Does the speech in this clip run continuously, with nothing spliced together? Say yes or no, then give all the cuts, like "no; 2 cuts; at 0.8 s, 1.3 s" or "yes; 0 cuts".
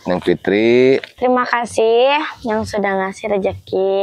no; 1 cut; at 1.1 s